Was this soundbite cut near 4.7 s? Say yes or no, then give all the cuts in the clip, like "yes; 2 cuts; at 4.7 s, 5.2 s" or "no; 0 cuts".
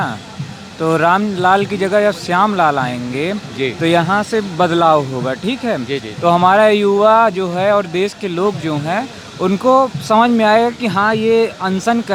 no; 0 cuts